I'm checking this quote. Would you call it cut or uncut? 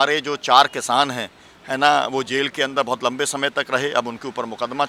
uncut